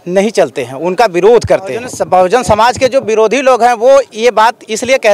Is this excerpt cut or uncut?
cut